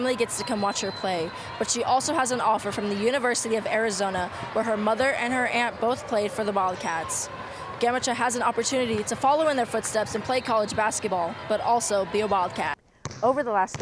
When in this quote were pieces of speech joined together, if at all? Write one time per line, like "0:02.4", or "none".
0:12.8